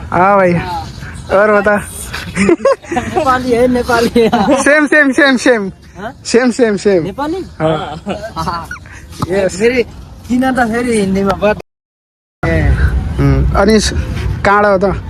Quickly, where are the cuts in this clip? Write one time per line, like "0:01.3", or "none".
none